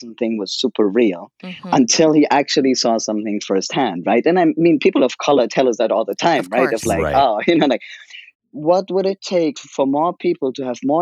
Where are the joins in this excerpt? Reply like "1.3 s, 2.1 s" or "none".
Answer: 8.3 s, 9.6 s